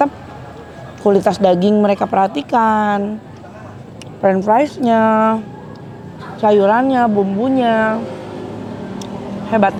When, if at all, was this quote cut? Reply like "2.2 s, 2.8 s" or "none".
none